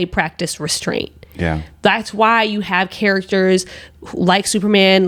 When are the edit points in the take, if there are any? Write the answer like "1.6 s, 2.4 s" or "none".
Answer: none